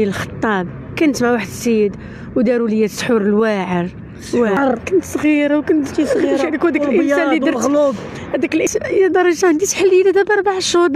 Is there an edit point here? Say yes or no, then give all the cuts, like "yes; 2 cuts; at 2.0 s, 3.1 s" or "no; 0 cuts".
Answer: yes; 2 cuts; at 4.6 s, 8.7 s